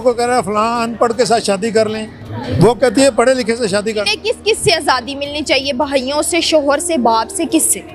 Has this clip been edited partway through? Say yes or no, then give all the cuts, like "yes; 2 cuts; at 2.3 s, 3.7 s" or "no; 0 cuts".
no; 0 cuts